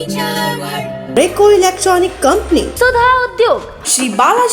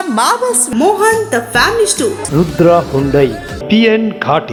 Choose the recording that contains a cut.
first; 1 cut; at 1.0 s

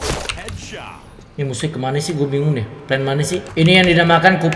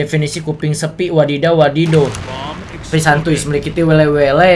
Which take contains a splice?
first; 1 cut; at 3.5 s

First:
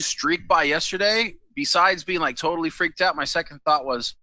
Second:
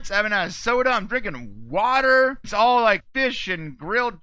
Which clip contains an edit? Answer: second; 2 cuts; at 2.5 s, 3.1 s

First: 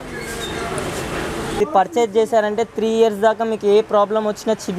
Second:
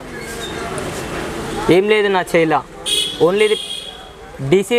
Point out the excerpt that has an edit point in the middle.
first; 1 cut; at 1.6 s

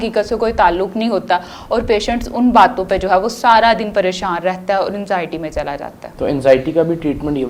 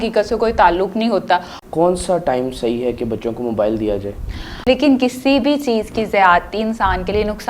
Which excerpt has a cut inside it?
second; 2 cuts; at 1.6 s, 4.5 s

